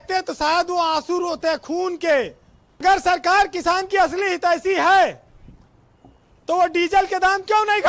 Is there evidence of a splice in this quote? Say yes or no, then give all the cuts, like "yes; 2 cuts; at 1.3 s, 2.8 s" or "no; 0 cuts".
yes; 1 cut; at 2.8 s